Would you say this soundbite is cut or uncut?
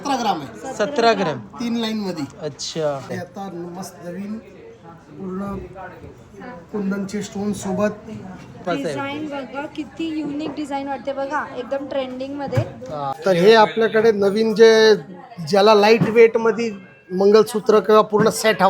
cut